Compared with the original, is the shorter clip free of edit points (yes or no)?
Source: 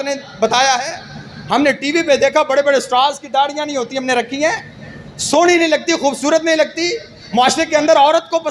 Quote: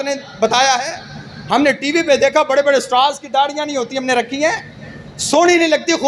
yes